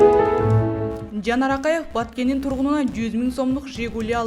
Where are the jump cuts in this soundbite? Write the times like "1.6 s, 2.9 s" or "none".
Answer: 1.1 s